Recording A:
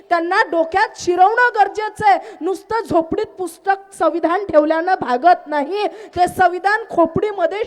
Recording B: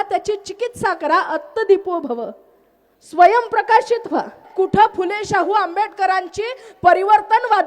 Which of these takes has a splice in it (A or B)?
B